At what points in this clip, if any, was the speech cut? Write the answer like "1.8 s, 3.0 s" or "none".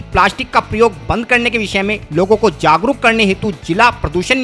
none